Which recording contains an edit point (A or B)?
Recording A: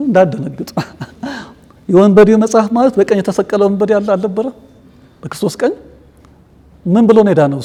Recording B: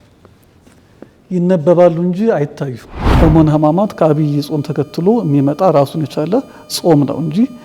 B